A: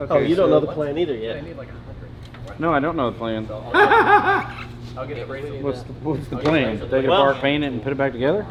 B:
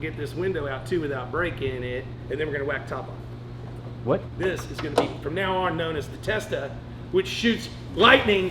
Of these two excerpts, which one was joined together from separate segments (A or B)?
B